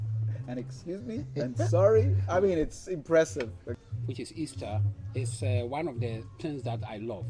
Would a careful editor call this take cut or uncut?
cut